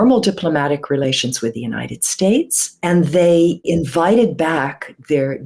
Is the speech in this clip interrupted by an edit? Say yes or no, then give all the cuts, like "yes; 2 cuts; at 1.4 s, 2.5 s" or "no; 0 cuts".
yes; 2 cuts; at 2.6 s, 3.7 s